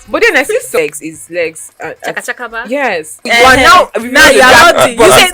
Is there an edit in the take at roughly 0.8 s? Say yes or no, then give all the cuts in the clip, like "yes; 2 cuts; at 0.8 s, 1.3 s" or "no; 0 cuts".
yes; 2 cuts; at 0.8 s, 3.3 s